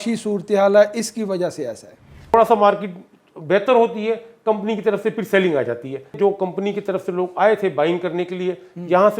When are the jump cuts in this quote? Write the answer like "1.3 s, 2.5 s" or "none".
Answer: 2.3 s, 6.2 s